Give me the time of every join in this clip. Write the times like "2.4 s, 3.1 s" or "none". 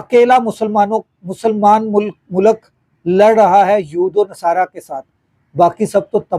none